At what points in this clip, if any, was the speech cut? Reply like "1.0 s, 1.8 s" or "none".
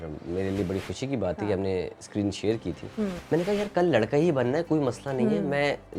3.2 s